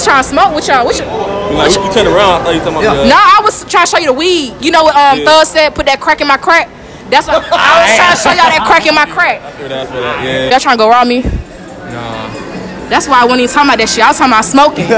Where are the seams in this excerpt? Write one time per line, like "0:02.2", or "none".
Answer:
0:10.5